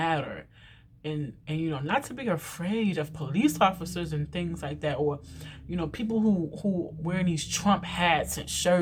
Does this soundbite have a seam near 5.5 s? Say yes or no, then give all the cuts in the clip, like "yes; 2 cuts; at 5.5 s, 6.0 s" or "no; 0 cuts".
no; 0 cuts